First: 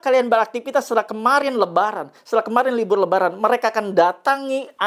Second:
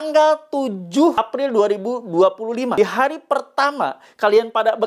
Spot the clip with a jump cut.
second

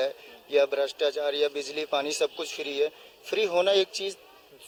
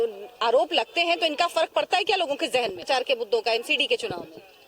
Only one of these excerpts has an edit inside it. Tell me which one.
second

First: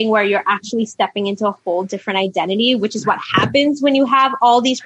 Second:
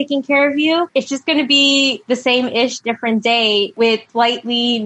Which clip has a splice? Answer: second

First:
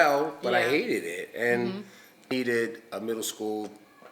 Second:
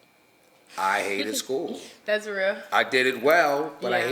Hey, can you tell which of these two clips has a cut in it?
first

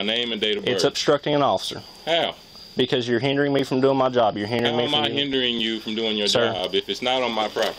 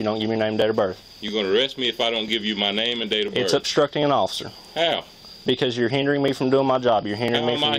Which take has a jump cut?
second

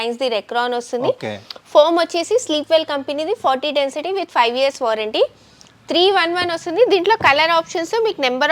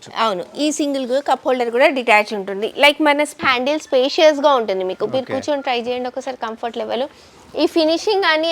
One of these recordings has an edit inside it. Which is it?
second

